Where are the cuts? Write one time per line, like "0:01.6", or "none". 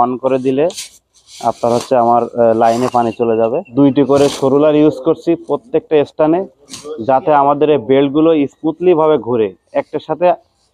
0:03.6